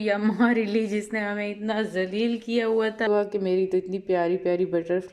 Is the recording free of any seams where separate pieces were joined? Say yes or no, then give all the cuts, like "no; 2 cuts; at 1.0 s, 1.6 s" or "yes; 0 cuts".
no; 1 cut; at 3.0 s